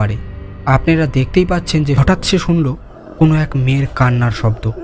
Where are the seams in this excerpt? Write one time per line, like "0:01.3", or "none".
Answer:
0:02.0